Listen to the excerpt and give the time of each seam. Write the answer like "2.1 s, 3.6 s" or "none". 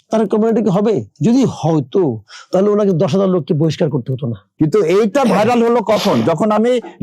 4.4 s